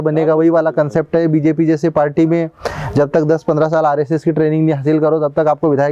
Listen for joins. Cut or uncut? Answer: uncut